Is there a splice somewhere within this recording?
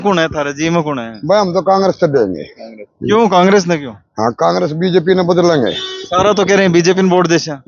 no; 0 cuts

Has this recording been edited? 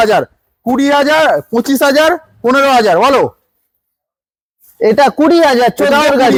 no; 0 cuts

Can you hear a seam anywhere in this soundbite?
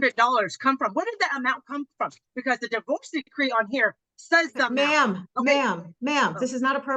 no; 0 cuts

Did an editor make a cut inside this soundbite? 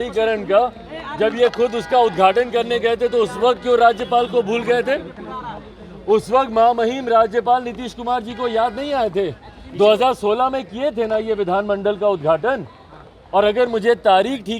no; 0 cuts

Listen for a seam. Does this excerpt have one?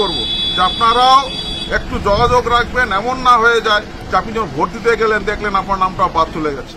no; 0 cuts

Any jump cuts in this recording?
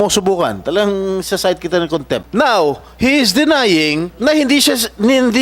yes; 2 cuts; at 2.3 s, 4.1 s

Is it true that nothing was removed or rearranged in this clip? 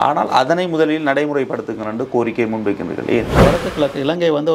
no; 1 cut; at 3.4 s

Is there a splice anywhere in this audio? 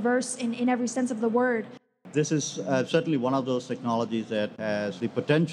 yes; 1 cut; at 1.9 s

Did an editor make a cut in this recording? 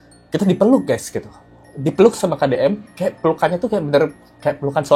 no; 0 cuts

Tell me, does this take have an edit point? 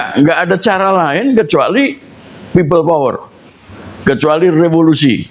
no; 0 cuts

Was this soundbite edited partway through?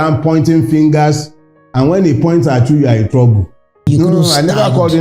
yes; 1 cut; at 3.9 s

